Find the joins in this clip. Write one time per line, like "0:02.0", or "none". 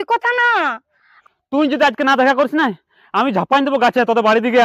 0:01.1